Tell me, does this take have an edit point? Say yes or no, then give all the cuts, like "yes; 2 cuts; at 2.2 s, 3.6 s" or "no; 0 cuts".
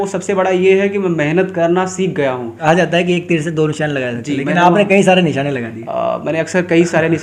yes; 1 cut; at 2.5 s